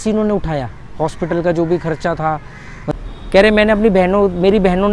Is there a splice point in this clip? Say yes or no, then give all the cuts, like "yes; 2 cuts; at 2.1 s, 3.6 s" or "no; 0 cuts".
yes; 1 cut; at 2.9 s